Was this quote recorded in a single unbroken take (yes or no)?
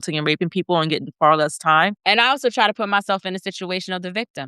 no